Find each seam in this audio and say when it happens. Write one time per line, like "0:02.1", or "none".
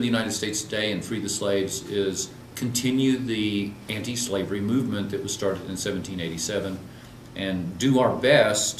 0:07.7